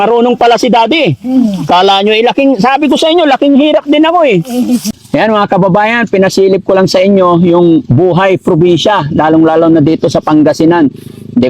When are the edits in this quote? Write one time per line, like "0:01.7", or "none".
0:04.9